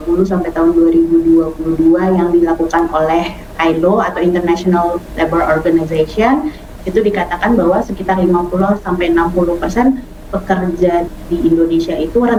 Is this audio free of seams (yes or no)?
yes